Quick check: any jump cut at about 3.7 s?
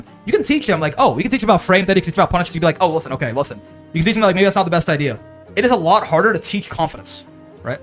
no; 0 cuts

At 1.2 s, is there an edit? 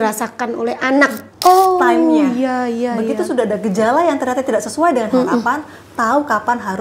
yes; 1 cut; at 1.2 s

